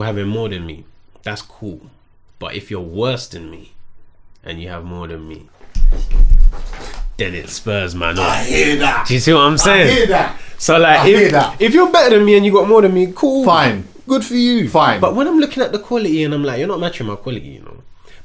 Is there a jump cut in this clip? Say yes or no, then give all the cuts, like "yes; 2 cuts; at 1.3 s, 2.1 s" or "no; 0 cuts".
no; 0 cuts